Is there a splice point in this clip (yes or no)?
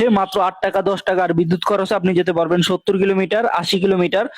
yes